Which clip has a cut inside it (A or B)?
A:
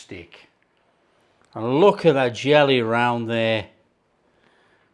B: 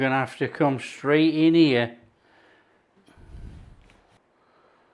B